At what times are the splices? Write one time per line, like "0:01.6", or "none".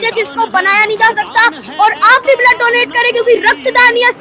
none